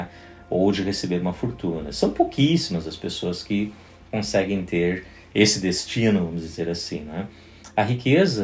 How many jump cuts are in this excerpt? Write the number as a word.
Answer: zero